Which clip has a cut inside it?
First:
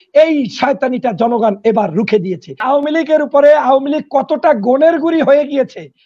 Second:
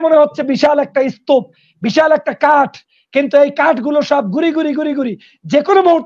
first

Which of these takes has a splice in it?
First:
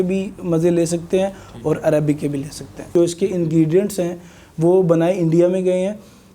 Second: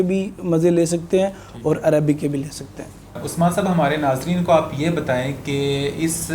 first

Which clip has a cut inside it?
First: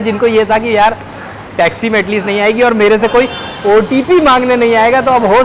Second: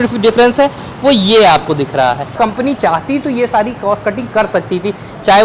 second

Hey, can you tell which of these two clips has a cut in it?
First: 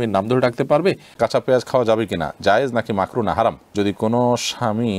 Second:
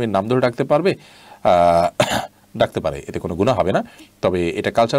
first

